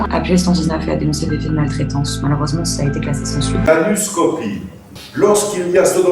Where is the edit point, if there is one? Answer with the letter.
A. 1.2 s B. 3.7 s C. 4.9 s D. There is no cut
B